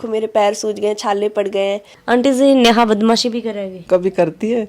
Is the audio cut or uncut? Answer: cut